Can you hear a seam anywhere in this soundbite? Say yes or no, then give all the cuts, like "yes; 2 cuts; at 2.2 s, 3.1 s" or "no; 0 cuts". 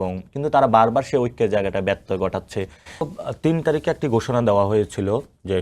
yes; 1 cut; at 3.0 s